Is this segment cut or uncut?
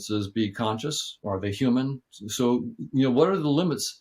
cut